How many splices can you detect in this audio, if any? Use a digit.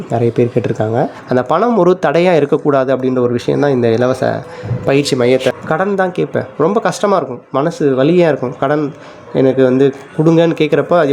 2